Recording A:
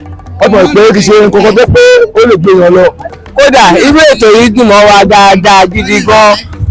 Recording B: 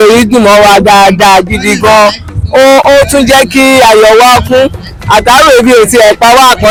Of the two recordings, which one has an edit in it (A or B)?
A